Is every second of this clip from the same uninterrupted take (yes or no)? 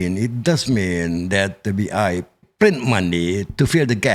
no